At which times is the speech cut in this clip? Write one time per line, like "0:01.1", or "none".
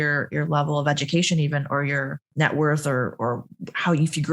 0:02.3